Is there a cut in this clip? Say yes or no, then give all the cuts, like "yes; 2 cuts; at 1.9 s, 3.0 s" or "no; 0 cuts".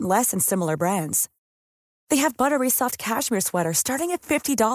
no; 0 cuts